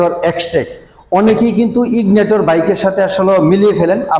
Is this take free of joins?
yes; 0 cuts

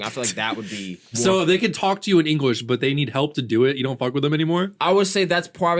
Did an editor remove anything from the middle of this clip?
yes; 1 cut; at 1.0 s

